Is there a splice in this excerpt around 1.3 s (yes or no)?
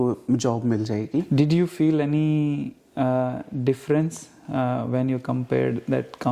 yes